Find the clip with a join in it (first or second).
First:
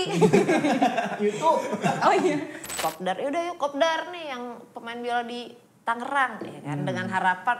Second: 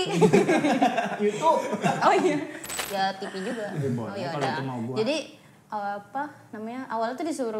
first